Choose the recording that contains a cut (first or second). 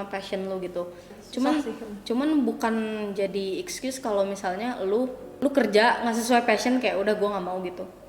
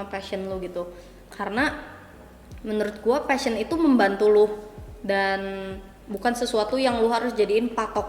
first